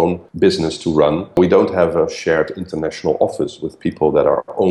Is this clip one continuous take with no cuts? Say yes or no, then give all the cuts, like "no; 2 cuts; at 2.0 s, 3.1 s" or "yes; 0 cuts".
no; 1 cut; at 1.4 s